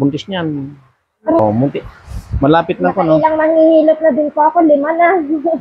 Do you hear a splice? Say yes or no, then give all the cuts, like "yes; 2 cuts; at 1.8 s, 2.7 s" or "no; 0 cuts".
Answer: yes; 1 cut; at 1.4 s